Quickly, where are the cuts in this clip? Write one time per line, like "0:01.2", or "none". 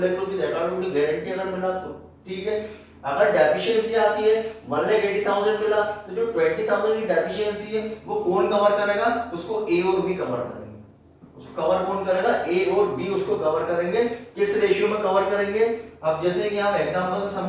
none